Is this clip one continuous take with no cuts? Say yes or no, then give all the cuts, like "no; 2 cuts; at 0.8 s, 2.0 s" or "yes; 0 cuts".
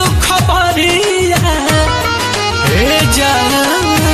yes; 0 cuts